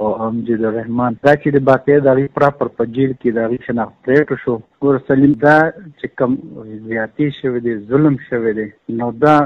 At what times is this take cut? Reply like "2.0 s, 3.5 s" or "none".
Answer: 1.2 s, 4.7 s